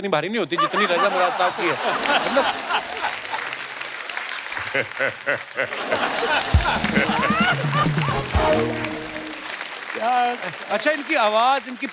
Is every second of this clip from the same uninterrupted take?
yes; 0 cuts

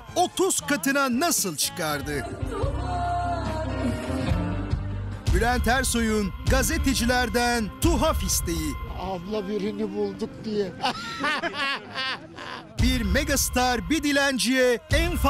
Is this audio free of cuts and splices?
yes; 0 cuts

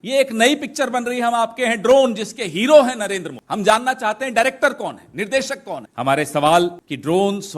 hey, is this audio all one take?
no; 1 cut; at 5.9 s

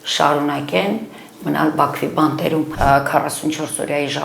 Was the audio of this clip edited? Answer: yes; 1 cut; at 2.7 s

